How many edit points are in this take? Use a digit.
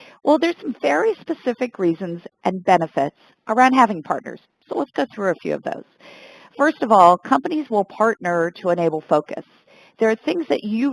1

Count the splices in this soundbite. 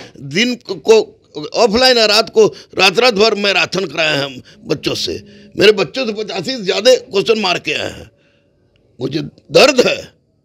0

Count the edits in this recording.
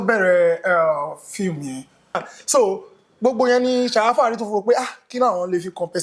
1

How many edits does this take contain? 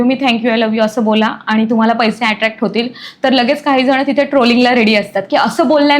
0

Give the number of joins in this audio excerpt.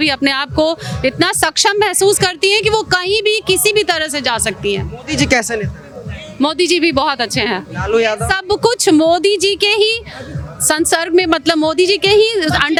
0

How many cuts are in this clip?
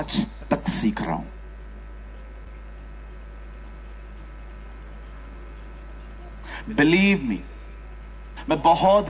0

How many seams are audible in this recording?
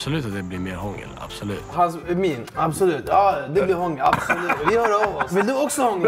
3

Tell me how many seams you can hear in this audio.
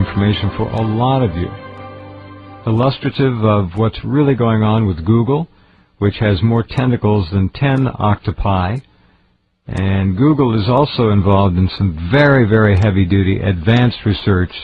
1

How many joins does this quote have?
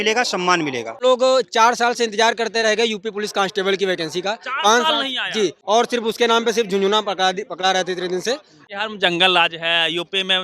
3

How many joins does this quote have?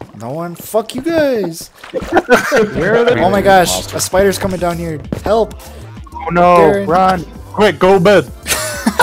1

